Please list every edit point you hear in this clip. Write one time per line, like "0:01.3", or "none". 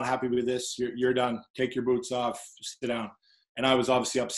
none